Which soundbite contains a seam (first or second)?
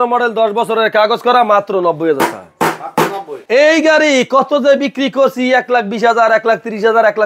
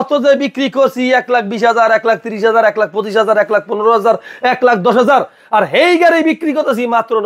first